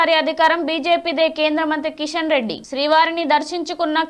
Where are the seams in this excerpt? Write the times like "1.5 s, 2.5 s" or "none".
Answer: none